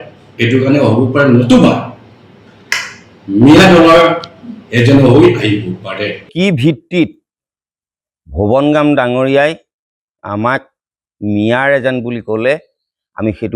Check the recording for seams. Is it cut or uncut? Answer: cut